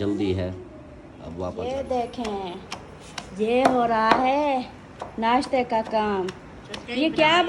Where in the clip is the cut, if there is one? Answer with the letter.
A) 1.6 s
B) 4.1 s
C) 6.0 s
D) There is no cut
A